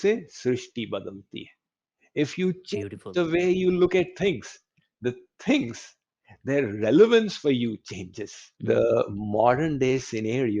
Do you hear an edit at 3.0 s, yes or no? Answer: no